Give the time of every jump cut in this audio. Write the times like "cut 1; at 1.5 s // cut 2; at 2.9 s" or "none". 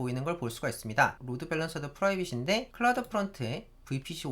cut 1; at 1.2 s // cut 2; at 2.7 s